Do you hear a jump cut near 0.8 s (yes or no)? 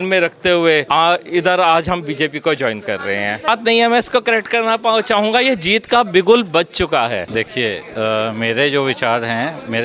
yes